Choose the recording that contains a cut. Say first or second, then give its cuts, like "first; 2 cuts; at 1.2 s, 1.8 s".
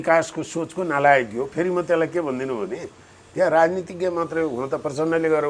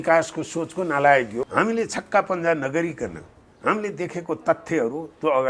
second; 1 cut; at 1.5 s